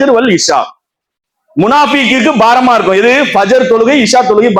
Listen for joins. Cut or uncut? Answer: uncut